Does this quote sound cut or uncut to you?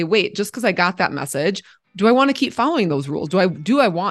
cut